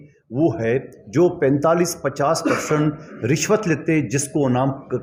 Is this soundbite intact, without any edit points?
yes; 0 cuts

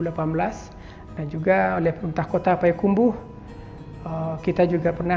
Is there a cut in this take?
no; 0 cuts

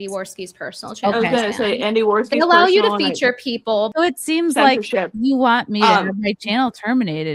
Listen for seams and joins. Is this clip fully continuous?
yes; 0 cuts

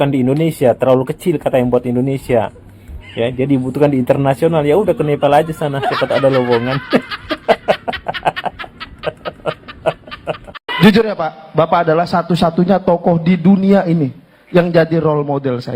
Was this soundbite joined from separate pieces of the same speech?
yes; 1 cut; at 10.7 s

